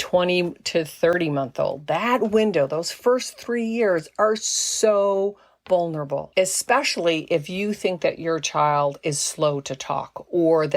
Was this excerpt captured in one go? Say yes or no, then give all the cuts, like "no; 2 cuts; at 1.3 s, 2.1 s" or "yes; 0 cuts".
no; 1 cut; at 6.3 s